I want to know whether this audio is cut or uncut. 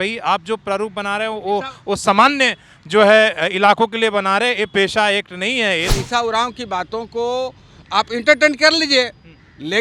cut